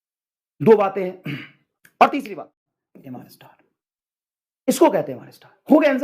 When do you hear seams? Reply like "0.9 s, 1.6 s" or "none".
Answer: 2.3 s